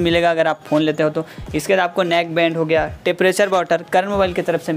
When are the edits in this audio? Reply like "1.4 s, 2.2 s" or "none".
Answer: none